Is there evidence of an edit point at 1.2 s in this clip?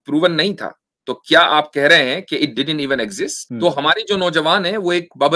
no; 1 cut; at 3.4 s

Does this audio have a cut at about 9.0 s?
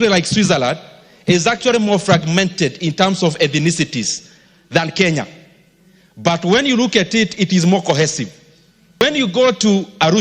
yes; 1 cut; at 9.0 s

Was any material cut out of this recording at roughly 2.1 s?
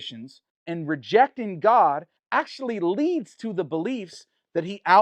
yes; 1 cut; at 2.1 s

